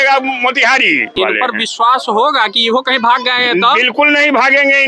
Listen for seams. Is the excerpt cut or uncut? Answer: cut